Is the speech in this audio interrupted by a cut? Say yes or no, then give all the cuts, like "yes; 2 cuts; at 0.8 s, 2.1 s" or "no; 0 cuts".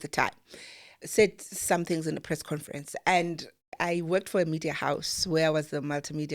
yes; 3 cuts; at 1.0 s, 2.2 s, 3.7 s